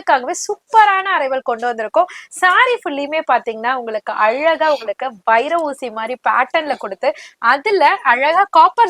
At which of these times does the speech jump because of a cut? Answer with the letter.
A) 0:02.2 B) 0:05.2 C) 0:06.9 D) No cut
D